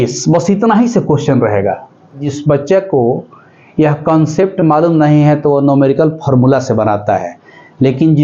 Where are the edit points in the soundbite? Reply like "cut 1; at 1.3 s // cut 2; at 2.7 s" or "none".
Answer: cut 1; at 2.2 s